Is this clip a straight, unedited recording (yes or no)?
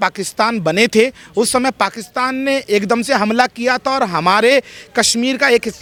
yes